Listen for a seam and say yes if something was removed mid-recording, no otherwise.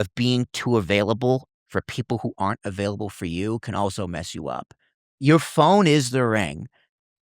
yes